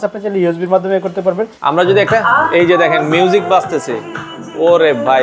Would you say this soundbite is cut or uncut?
cut